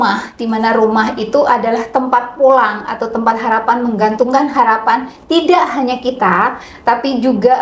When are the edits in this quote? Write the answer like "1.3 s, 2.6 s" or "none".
none

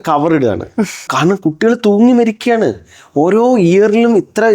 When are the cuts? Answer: 1.1 s

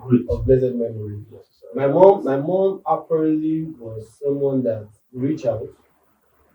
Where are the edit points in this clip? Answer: none

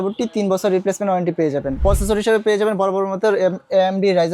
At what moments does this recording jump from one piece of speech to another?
1.8 s

